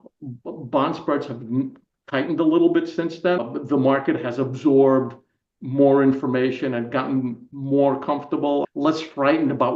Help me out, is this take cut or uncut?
cut